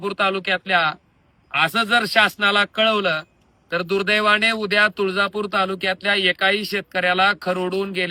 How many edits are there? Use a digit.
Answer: 0